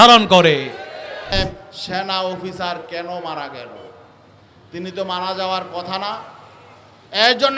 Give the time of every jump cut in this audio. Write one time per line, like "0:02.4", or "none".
0:01.4